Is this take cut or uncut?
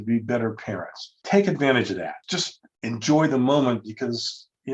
cut